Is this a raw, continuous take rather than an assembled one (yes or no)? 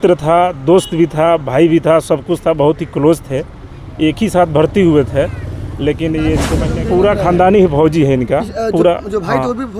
no